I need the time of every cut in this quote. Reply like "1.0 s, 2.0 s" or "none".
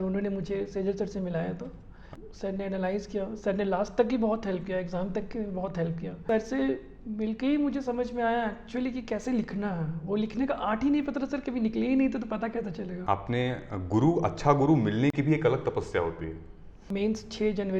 2.0 s, 6.2 s, 12.9 s, 16.9 s